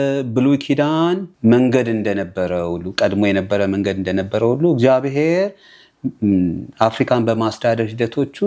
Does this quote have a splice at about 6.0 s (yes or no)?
no